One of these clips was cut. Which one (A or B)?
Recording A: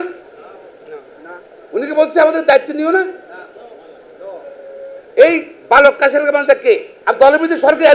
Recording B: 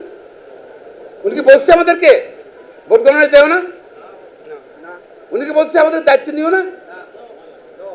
A